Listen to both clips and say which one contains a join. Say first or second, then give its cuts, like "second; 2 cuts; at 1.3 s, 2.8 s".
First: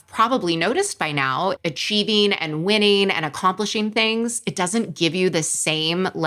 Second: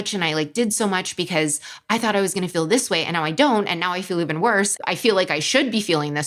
first; 1 cut; at 1.6 s